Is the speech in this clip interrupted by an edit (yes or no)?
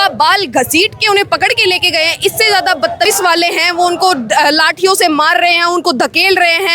yes